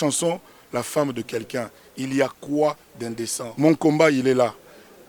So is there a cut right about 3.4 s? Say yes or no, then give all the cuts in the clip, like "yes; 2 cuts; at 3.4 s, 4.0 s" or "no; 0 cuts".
yes; 1 cut; at 3.4 s